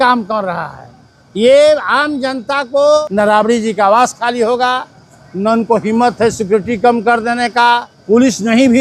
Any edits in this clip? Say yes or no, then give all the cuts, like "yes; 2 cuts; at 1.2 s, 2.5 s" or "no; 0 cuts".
yes; 2 cuts; at 3.0 s, 7.9 s